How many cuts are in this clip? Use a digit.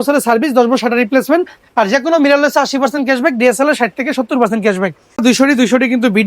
1